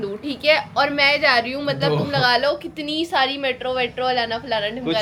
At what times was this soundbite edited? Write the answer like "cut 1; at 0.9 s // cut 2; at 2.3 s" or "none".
none